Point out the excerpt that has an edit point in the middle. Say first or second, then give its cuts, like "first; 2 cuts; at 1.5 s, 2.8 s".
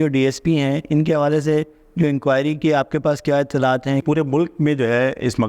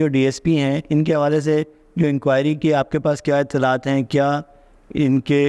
first; 1 cut; at 4.0 s